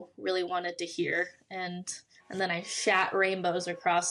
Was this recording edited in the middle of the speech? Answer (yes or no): no